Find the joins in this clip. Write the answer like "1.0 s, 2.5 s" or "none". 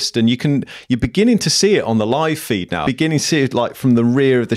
2.8 s